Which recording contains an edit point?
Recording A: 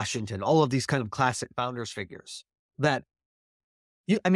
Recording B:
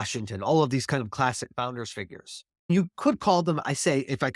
B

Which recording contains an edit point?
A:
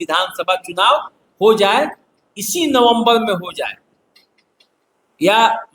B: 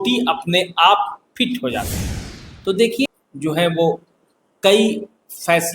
B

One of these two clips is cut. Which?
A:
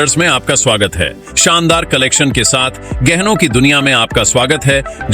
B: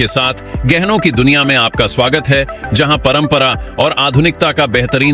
A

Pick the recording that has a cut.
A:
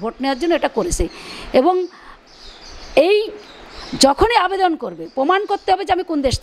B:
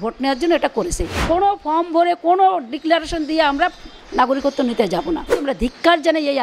B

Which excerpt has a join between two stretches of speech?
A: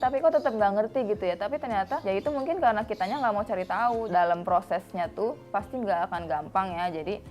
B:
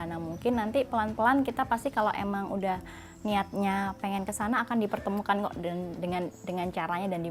A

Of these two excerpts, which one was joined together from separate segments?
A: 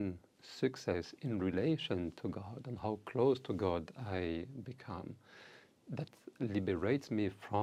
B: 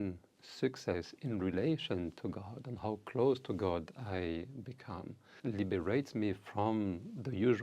B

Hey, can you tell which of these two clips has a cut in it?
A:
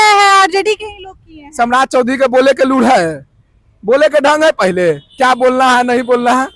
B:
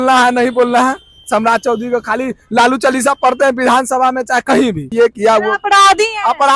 B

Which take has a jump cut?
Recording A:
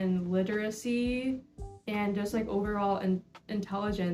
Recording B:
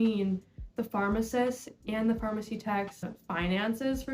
B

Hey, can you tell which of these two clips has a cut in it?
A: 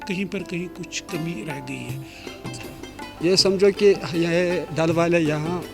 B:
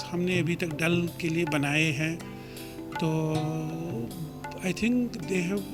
A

